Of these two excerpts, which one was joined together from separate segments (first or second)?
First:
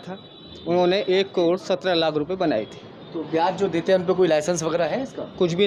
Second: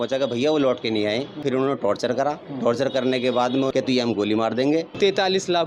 second